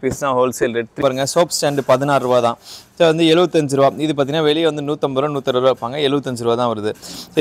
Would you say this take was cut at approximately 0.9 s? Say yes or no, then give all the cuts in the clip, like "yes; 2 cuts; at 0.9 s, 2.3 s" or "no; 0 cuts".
yes; 1 cut; at 0.9 s